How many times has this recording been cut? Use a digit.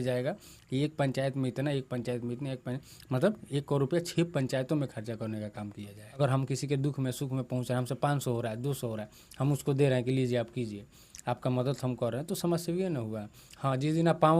1